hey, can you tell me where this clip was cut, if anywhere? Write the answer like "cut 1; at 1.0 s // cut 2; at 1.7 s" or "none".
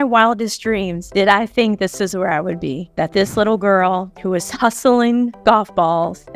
cut 1; at 1.0 s